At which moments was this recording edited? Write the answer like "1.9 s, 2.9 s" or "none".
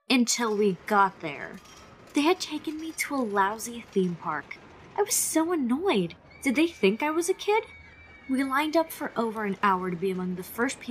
9.7 s